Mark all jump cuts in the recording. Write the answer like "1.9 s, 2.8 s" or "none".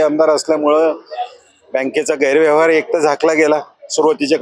none